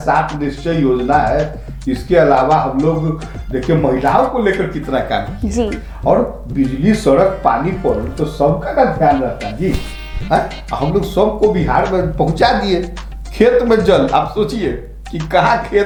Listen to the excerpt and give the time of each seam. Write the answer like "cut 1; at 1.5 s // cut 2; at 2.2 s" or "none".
none